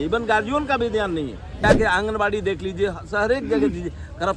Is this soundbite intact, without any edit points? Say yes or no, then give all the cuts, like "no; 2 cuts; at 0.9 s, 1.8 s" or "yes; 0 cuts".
no; 1 cut; at 1.6 s